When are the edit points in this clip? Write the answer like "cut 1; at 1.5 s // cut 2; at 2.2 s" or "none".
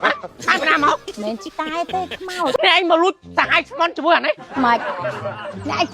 cut 1; at 2.5 s